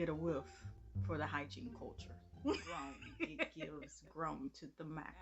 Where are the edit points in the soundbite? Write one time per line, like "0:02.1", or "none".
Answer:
0:03.6